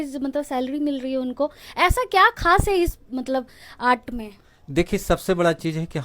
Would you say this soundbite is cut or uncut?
uncut